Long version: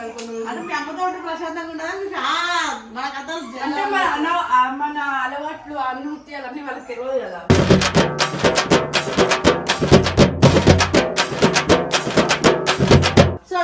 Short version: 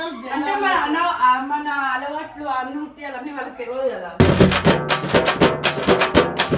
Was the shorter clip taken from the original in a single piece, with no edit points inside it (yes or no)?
yes